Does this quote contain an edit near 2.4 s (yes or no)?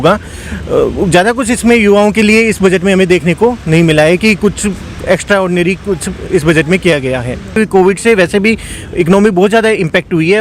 no